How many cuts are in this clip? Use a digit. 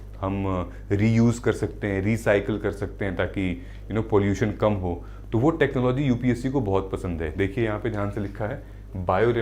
0